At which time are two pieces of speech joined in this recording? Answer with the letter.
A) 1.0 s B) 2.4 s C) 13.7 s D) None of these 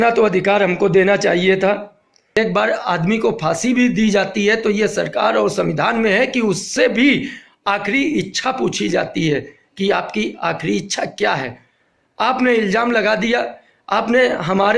B